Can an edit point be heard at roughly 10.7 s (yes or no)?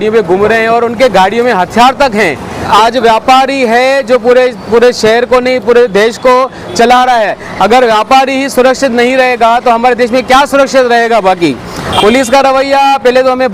no